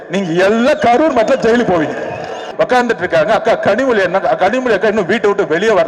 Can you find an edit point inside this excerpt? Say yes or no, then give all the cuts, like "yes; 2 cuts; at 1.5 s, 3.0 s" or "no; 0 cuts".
yes; 1 cut; at 2.4 s